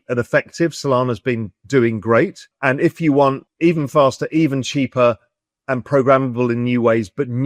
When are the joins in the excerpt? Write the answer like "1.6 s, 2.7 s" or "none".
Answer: 1.5 s, 2.5 s, 3.5 s